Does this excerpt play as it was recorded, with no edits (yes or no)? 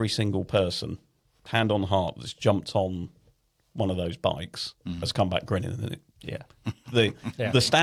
yes